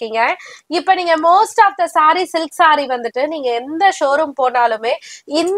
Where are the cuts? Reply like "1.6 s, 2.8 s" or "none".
none

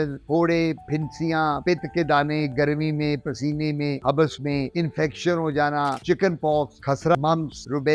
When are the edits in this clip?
6.0 s, 7.1 s

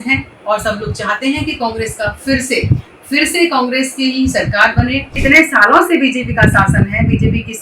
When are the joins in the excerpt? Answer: 5.2 s

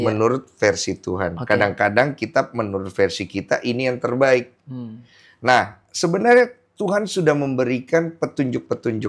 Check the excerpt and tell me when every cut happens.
none

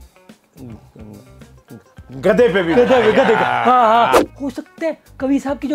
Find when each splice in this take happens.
4.2 s

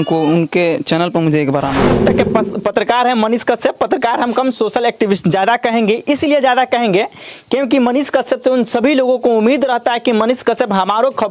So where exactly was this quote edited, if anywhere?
1.9 s

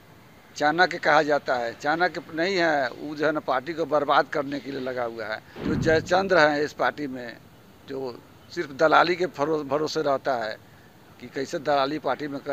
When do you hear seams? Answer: 5.5 s

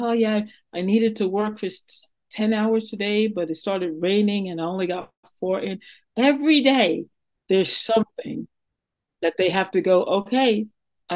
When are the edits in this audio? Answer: none

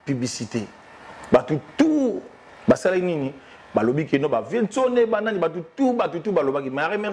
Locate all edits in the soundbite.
none

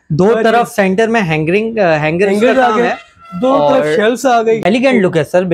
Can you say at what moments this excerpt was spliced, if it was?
4.6 s

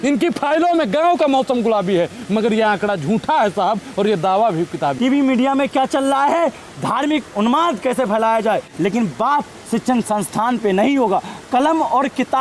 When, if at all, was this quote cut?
5.0 s, 8.7 s

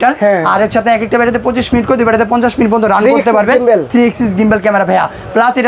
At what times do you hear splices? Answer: none

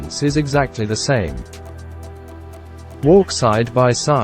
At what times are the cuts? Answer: 1.4 s, 2.7 s

